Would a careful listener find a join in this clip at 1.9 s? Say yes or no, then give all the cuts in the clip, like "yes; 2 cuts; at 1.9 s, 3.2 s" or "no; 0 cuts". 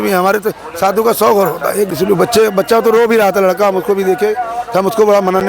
yes; 1 cut; at 1.9 s